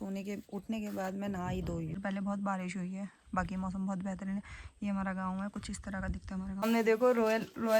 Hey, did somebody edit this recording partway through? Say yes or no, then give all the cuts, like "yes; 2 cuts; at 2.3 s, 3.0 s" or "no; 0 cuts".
yes; 2 cuts; at 2.0 s, 6.7 s